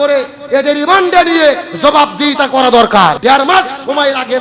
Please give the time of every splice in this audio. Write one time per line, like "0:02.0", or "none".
0:03.2

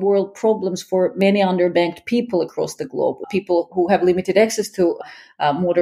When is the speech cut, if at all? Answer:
0:03.2

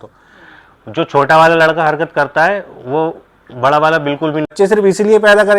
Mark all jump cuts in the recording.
0:04.5

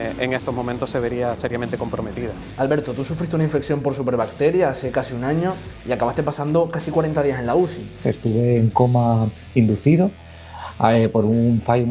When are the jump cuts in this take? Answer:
0:02.3
0:07.9

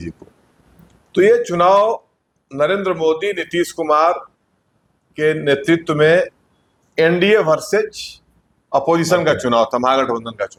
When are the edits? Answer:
none

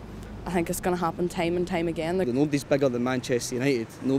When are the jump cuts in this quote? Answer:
0:02.3

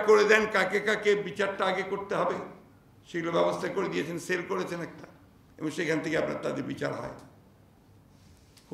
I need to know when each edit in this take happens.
none

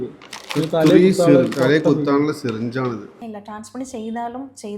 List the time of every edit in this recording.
0:03.2

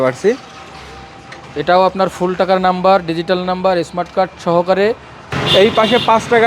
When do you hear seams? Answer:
0:05.3

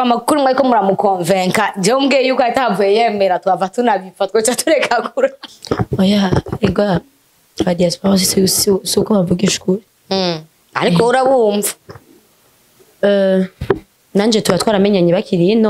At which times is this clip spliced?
0:05.4

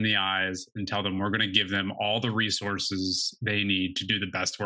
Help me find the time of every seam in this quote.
none

